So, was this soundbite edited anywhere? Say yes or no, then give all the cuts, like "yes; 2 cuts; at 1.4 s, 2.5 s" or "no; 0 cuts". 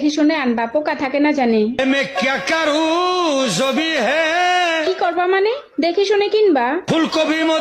no; 0 cuts